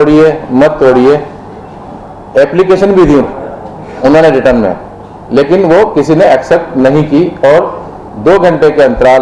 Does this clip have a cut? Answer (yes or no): no